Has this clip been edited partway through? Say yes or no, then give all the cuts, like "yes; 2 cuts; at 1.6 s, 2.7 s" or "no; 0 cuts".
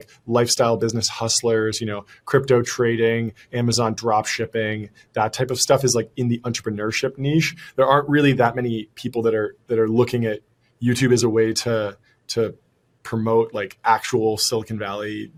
no; 0 cuts